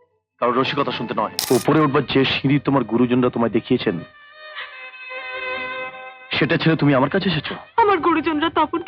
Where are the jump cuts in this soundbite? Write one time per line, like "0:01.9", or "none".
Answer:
0:01.4